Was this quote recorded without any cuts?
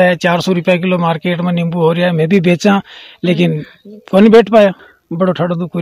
no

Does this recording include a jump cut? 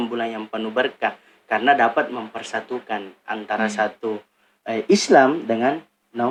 no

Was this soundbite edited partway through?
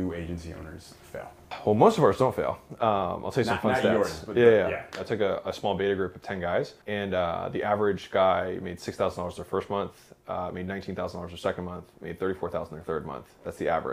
yes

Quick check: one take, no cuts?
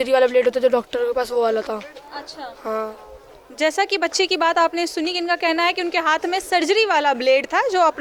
yes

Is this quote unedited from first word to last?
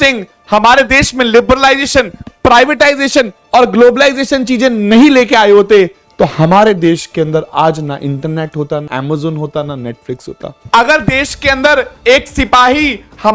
no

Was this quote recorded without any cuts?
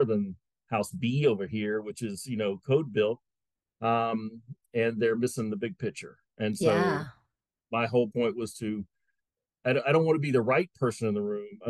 yes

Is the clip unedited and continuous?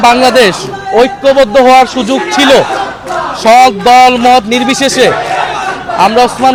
yes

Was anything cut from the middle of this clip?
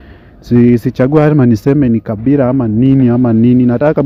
no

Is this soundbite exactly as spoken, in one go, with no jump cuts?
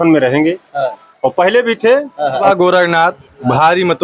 no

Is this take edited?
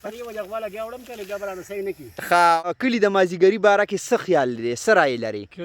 yes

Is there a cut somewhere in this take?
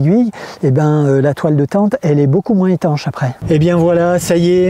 yes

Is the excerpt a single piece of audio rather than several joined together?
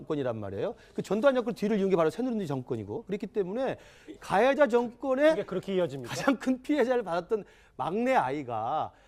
yes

